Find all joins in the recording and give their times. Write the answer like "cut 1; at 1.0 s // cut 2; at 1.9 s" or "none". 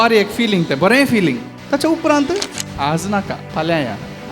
cut 1; at 1.5 s // cut 2; at 2.6 s // cut 3; at 3.4 s